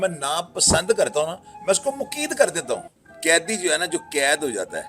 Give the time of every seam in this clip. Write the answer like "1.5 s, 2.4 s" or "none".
3.0 s